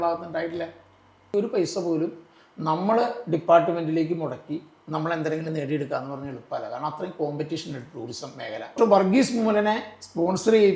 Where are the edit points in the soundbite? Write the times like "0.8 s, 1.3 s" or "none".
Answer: 1.3 s, 8.7 s